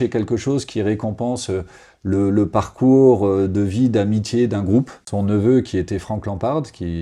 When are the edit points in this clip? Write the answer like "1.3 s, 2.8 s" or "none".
5.0 s